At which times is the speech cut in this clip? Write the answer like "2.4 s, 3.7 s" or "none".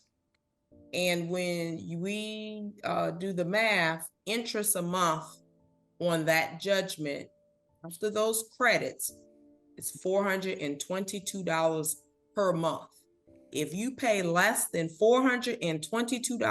2.1 s, 14.6 s

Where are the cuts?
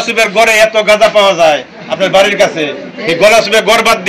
none

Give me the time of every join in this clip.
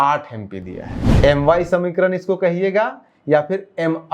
1.0 s

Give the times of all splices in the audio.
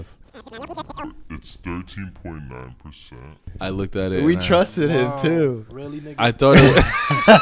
none

